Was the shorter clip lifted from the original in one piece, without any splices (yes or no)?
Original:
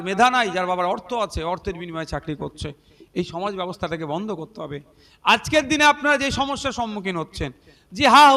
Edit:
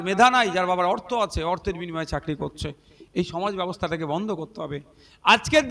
yes